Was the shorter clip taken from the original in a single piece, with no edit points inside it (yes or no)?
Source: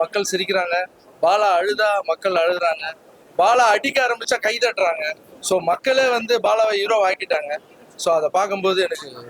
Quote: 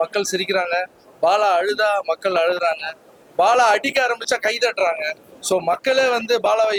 yes